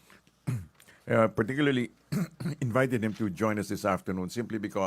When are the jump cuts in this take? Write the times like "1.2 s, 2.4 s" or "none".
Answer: 2.2 s